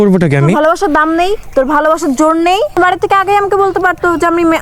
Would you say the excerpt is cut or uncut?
cut